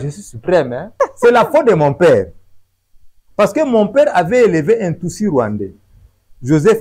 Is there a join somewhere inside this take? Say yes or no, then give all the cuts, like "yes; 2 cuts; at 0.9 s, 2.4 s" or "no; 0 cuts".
yes; 1 cut; at 0.9 s